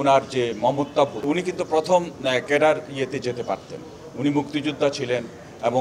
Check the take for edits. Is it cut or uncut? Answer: cut